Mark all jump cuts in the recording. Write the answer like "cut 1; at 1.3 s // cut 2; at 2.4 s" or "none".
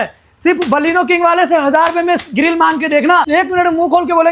cut 1; at 3.3 s